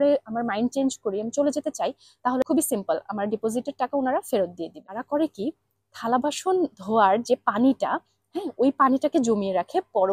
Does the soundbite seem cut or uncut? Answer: cut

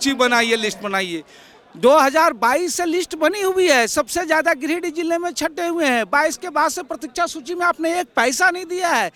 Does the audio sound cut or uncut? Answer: uncut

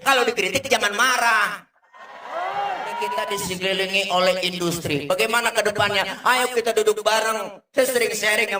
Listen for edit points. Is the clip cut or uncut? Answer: cut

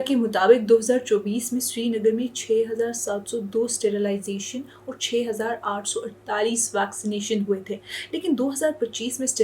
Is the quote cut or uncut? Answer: uncut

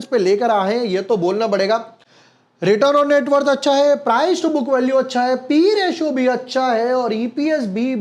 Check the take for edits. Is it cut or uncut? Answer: uncut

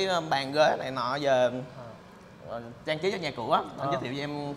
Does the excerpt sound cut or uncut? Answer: uncut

